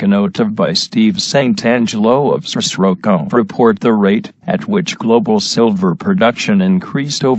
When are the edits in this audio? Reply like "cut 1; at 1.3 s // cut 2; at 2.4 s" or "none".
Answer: none